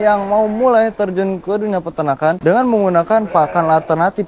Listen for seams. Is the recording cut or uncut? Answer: cut